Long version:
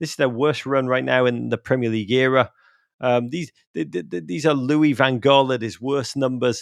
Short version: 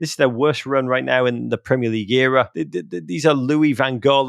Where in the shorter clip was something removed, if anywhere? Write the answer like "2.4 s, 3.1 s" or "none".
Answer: 2.6 s

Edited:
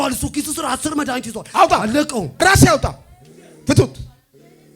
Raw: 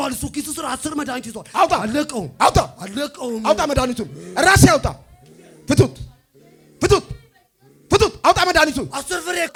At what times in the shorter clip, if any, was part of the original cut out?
2.3 s

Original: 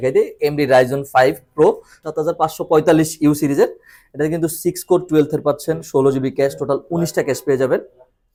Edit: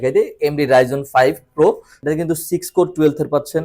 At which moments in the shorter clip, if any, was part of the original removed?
1.9 s

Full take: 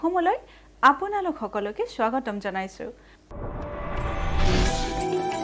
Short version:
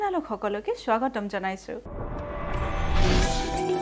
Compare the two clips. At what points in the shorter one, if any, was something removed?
1.9 s

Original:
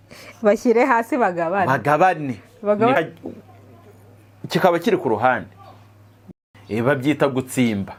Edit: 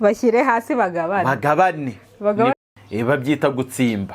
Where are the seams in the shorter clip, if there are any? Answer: 2.5 s

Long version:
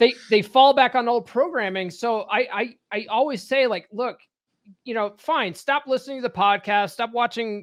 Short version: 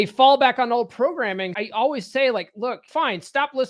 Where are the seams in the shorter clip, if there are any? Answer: 1.5 s, 2.8 s

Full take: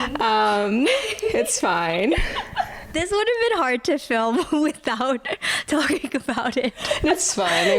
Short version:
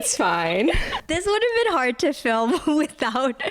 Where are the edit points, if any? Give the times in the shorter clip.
1.0 s

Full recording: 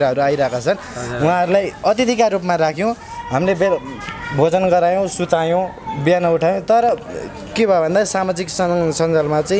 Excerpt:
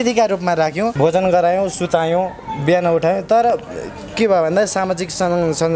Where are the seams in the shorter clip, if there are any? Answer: 0.9 s

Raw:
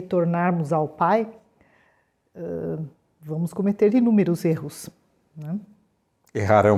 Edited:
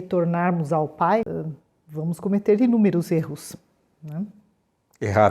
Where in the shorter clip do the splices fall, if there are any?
1.3 s

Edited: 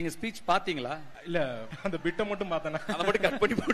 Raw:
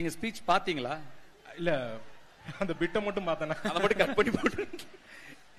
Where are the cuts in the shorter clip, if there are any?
1.1 s, 1.7 s

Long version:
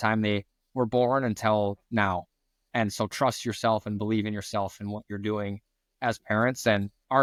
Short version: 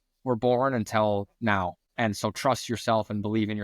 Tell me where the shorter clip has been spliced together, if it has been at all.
1.8 s

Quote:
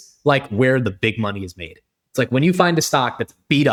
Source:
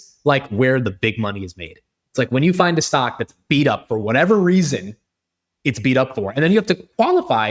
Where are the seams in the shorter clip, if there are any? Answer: none

